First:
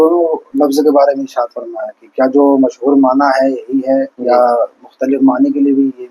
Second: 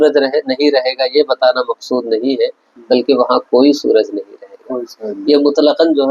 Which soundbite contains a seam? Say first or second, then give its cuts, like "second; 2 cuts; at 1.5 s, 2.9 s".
first; 1 cut; at 4.1 s